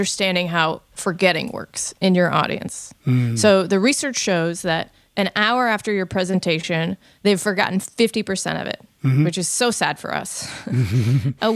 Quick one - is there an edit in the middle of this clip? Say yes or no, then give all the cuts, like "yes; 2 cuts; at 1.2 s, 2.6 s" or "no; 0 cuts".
no; 0 cuts